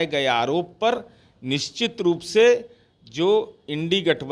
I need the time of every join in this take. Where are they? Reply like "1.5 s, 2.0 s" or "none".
none